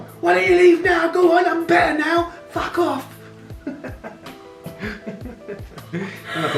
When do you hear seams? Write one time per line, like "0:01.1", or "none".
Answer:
none